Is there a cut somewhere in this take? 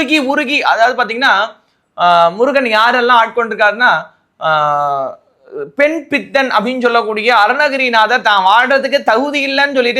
no; 0 cuts

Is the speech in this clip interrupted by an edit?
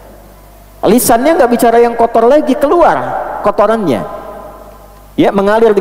no; 0 cuts

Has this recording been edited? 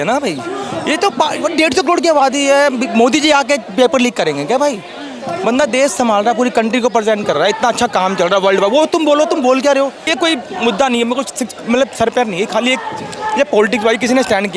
yes; 1 cut; at 10.1 s

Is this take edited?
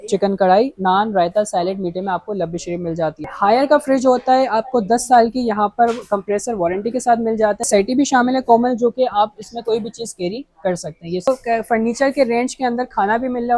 yes; 3 cuts; at 3.2 s, 7.7 s, 11.3 s

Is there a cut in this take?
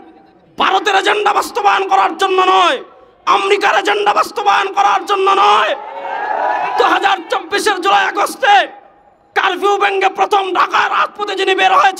no; 0 cuts

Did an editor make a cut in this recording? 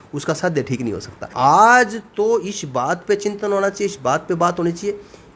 yes; 1 cut; at 1.2 s

